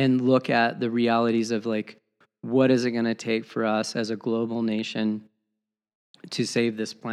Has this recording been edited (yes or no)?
no